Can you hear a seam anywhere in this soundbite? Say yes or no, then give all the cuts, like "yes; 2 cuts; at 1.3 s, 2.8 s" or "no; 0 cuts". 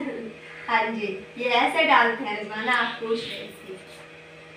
no; 0 cuts